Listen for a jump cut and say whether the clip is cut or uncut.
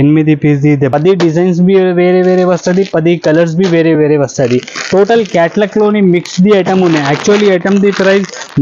cut